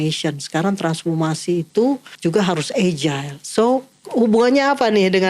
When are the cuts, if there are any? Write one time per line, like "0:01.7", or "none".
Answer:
0:02.1
0:04.0